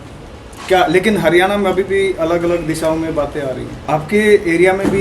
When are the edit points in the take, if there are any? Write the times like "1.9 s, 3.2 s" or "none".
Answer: 3.7 s